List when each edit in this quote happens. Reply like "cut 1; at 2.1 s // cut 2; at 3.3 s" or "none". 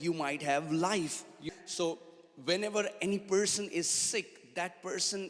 cut 1; at 1.4 s